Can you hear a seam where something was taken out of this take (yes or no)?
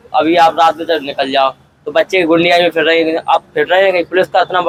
no